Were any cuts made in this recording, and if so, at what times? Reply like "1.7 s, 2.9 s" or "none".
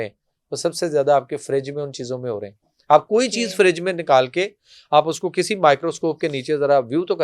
none

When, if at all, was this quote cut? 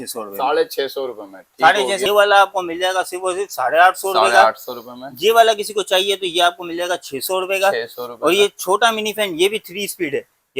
2.1 s

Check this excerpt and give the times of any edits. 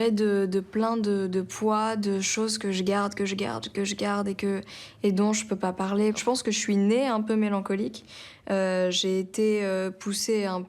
6.2 s

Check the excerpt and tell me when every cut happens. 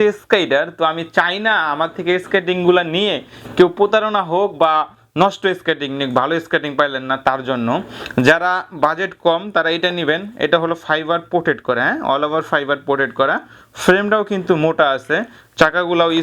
none

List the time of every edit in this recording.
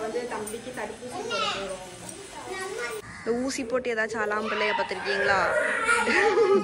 3.0 s

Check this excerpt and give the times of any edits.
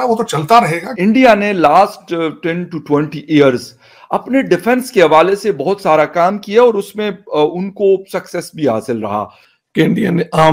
0.9 s, 9.6 s

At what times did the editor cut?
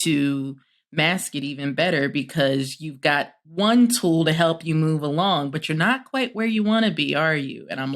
3.4 s

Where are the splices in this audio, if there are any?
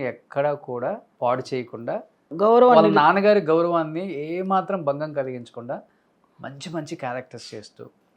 1.1 s, 2.3 s

